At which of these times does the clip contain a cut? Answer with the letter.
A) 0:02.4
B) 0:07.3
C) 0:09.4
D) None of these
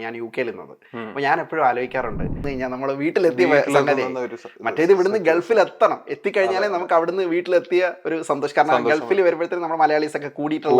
A